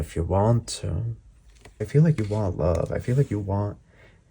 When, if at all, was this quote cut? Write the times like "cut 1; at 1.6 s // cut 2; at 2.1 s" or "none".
cut 1; at 1.9 s